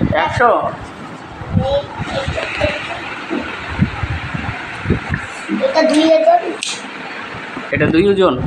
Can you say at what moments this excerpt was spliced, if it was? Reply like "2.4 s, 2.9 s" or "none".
none